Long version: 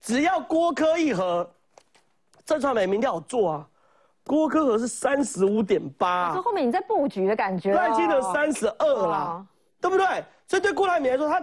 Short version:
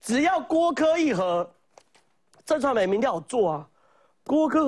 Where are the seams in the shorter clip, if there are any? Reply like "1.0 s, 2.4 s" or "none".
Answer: none